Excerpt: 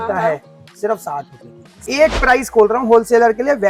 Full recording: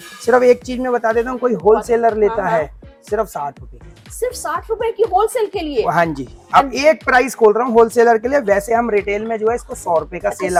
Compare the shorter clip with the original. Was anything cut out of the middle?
yes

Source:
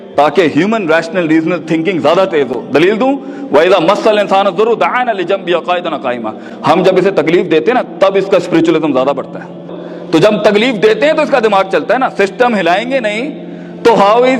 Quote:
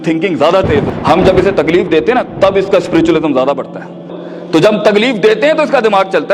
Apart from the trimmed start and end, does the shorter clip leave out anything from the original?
yes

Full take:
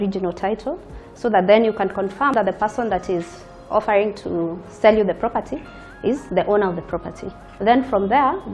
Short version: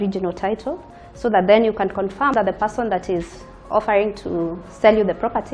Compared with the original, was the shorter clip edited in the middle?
no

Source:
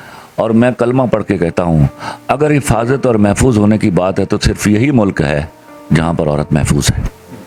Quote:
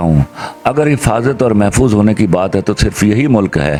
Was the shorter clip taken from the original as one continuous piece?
yes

